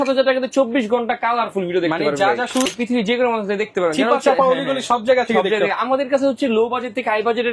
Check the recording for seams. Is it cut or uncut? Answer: cut